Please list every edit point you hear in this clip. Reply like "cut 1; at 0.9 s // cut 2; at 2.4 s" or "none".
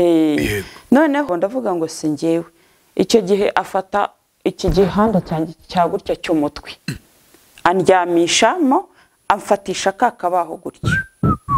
cut 1; at 1.3 s

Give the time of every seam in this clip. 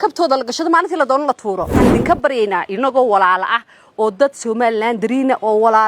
cut 1; at 1.7 s

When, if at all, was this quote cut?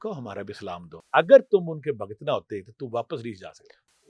cut 1; at 0.9 s

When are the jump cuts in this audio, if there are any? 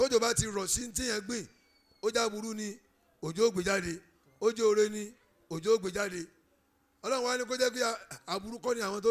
none

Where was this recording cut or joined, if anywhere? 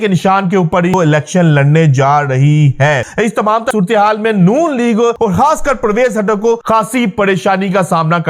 cut 1; at 0.9 s // cut 2; at 3.6 s // cut 3; at 5.2 s // cut 4; at 6.6 s

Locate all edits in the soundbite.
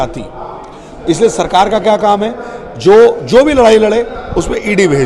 none

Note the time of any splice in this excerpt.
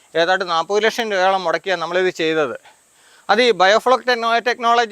none

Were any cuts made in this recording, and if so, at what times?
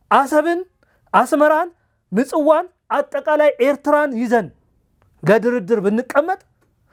none

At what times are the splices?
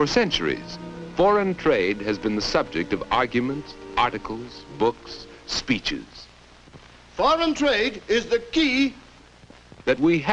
none

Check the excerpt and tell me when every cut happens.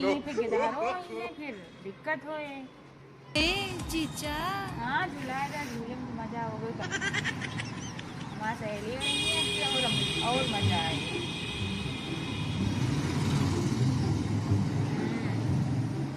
cut 1; at 3.4 s

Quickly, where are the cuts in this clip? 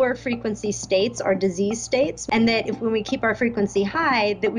cut 1; at 2.2 s

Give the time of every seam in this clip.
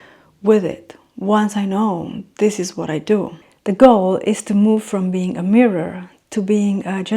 cut 1; at 3.4 s

